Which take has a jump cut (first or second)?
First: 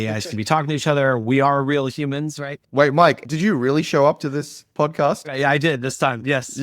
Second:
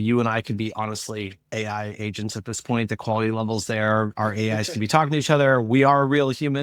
first